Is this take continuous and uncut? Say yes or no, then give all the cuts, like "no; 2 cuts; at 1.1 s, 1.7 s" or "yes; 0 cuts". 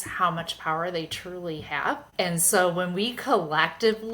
no; 1 cut; at 2.1 s